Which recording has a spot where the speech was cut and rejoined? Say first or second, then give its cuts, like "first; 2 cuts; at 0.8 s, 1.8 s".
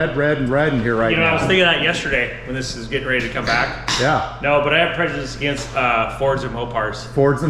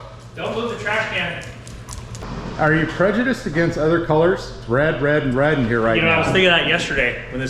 second; 1 cut; at 2.2 s